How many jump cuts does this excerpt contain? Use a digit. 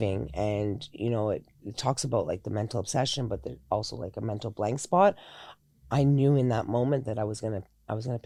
0